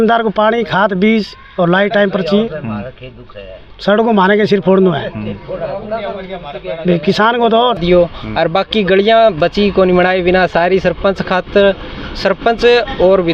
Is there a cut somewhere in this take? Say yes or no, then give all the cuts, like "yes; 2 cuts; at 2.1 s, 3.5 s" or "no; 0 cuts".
yes; 1 cut; at 7.8 s